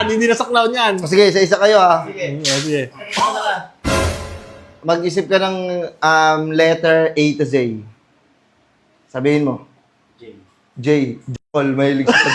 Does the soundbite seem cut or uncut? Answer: uncut